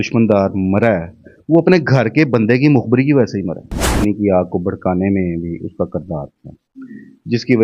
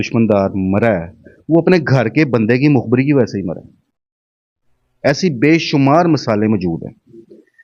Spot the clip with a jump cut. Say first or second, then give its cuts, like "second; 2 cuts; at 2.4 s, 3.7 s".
first; 1 cut; at 4.0 s